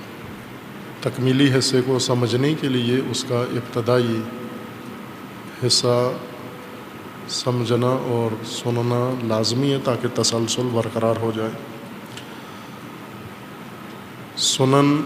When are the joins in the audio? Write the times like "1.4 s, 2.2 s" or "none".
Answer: 7.3 s